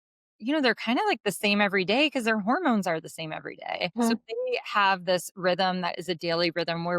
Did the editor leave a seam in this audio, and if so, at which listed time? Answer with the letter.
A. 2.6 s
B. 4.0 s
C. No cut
B